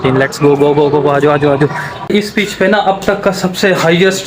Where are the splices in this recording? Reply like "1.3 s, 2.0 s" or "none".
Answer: 2.1 s

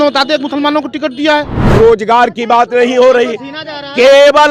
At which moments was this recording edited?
1.6 s

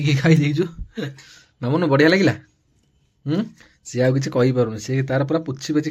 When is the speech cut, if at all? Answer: none

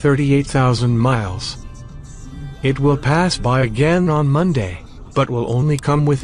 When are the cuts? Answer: none

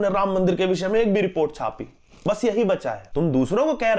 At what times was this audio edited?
3.0 s

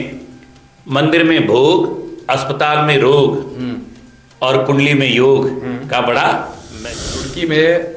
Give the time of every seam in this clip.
6.8 s

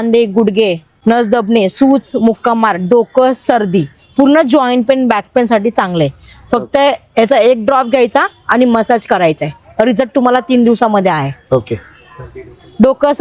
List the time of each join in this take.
none

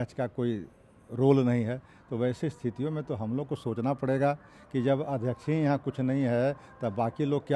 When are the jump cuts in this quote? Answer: none

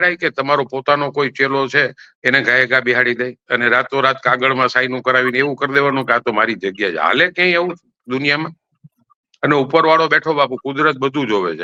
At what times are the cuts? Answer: none

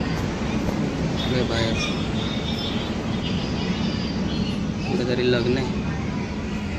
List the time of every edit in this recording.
none

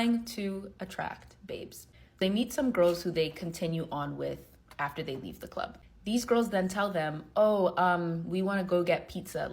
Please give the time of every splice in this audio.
2.2 s

